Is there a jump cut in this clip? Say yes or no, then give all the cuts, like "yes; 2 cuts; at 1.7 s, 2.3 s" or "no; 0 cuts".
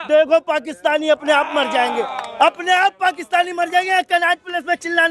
no; 0 cuts